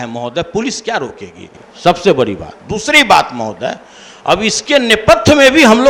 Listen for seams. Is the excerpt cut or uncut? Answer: uncut